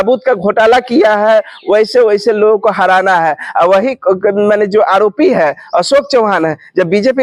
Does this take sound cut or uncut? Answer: uncut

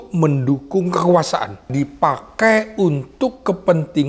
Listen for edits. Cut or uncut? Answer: cut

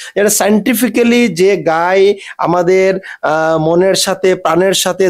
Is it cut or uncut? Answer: uncut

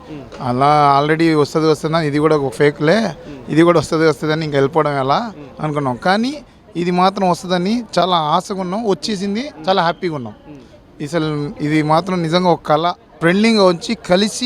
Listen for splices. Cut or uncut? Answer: cut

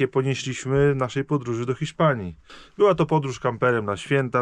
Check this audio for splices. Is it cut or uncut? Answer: uncut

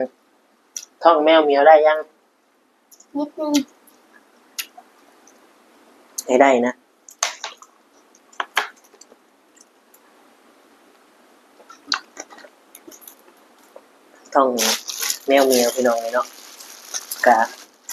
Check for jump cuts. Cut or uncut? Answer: uncut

